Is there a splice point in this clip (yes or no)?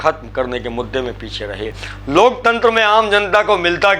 yes